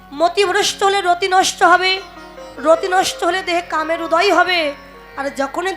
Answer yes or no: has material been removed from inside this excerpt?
no